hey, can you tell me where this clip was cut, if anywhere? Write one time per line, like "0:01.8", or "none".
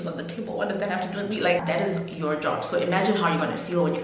0:01.6